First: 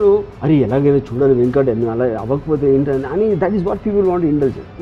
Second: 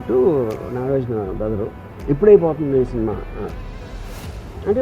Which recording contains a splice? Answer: second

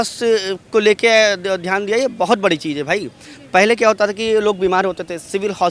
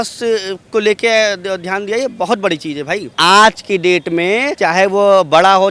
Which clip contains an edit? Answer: second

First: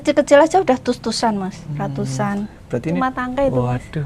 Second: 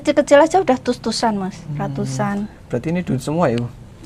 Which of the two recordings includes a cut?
first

